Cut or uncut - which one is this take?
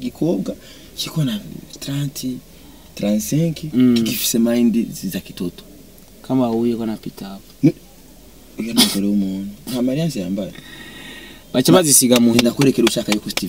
uncut